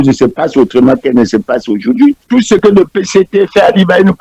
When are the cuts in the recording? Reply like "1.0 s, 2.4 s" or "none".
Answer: 2.2 s